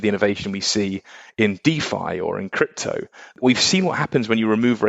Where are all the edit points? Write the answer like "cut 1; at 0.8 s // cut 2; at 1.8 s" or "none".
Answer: cut 1; at 3.4 s

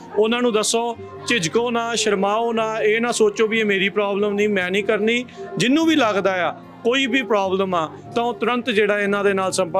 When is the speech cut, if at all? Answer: none

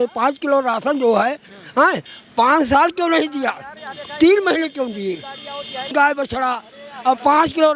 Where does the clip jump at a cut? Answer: cut 1; at 5.9 s

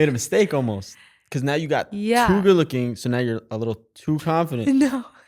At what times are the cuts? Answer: none

